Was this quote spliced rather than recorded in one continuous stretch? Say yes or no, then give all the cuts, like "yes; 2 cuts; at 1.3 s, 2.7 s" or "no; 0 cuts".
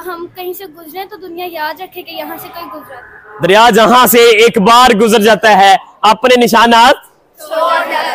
no; 0 cuts